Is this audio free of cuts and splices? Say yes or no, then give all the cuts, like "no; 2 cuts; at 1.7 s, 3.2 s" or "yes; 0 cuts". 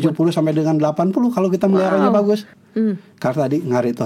no; 1 cut; at 2.6 s